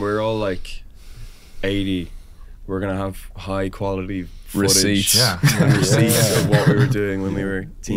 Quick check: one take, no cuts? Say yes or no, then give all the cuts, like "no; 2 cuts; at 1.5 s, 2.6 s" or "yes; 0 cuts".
yes; 0 cuts